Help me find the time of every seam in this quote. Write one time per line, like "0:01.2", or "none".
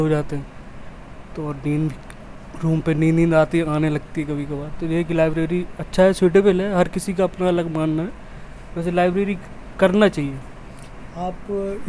none